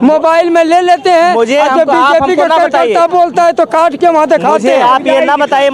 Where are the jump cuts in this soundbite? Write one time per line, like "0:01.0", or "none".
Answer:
none

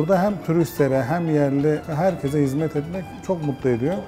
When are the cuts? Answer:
0:01.9
0:03.1

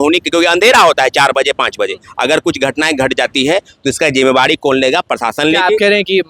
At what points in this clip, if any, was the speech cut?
none

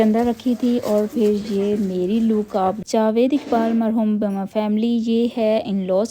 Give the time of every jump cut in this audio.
0:02.8

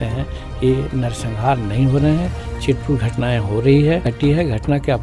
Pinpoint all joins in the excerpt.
0:04.1

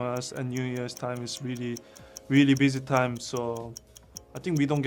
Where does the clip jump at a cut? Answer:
none

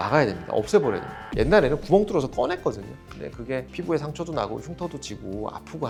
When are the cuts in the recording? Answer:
none

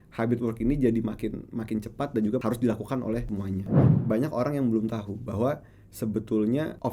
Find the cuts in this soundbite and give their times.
0:03.8

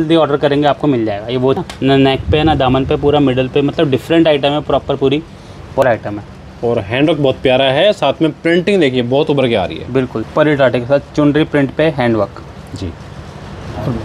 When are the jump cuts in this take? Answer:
0:01.6
0:05.8
0:10.3

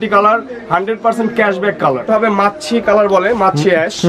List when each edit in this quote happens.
0:02.0

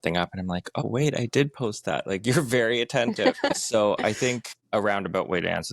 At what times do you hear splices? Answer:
0:04.5

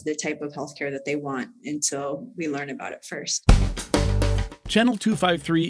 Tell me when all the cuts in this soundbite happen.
0:03.4

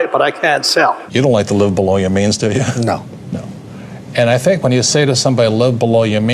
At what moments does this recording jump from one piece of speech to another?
0:01.0

